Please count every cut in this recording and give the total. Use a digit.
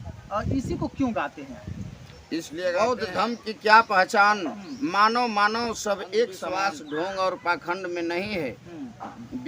2